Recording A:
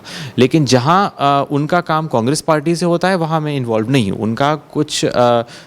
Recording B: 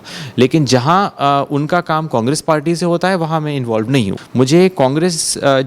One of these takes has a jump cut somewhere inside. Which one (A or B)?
B